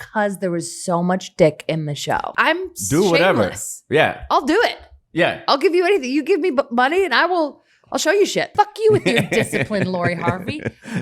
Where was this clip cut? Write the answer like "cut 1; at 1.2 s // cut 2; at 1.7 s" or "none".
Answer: cut 1; at 2.3 s // cut 2; at 8.5 s

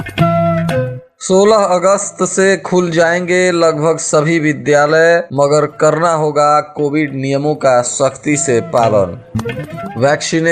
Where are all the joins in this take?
cut 1; at 1.0 s

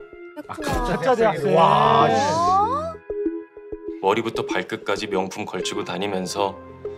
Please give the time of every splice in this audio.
none

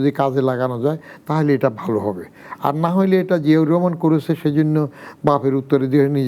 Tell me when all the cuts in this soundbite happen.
none

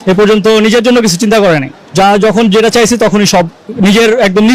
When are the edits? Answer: cut 1; at 1.8 s

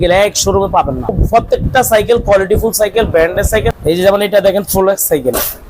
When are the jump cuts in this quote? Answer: cut 1; at 1.1 s // cut 2; at 3.7 s

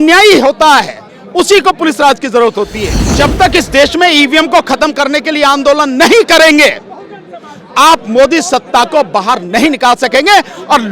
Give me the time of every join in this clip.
cut 1; at 3.1 s

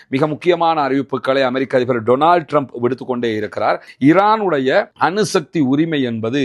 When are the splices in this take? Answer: cut 1; at 3.9 s

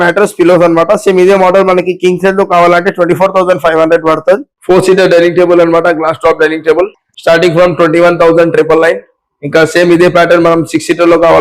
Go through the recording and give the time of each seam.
cut 1; at 4.5 s

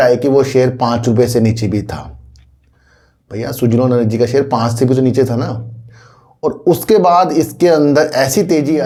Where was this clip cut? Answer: none

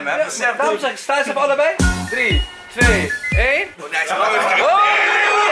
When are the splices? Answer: none

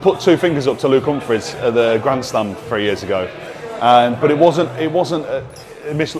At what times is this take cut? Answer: none

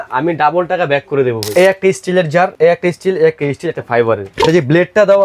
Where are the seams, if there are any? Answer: cut 1; at 1.4 s // cut 2; at 2.5 s // cut 3; at 4.3 s

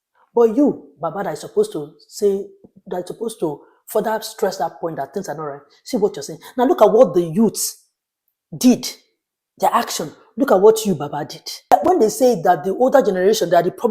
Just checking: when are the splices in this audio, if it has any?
cut 1; at 11.7 s

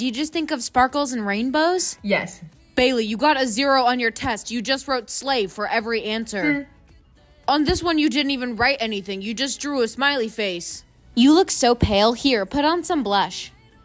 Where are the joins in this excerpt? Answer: none

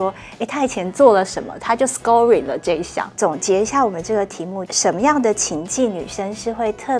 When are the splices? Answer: cut 1; at 3.1 s // cut 2; at 4.6 s

